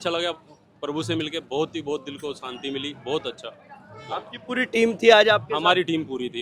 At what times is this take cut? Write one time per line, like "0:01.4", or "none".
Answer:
none